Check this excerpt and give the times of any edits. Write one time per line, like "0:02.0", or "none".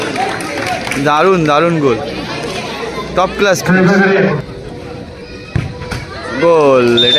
0:04.4